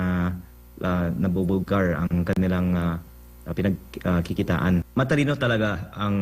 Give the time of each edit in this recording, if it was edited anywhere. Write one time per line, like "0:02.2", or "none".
0:04.9

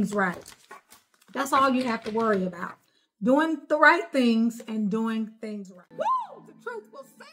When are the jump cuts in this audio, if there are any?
0:05.5

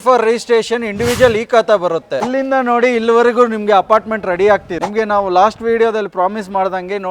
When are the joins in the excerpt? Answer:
0:02.2

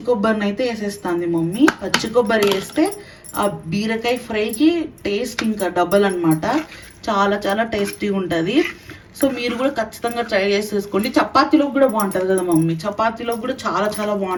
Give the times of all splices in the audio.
none

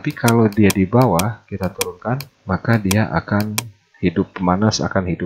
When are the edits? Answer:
0:02.3

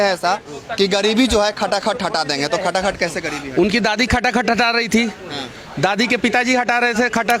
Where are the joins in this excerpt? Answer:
none

